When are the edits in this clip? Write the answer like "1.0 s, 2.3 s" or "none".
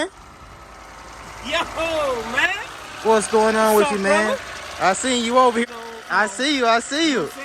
5.6 s